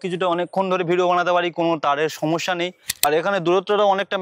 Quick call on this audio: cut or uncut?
cut